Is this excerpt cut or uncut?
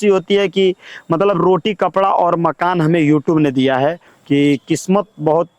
cut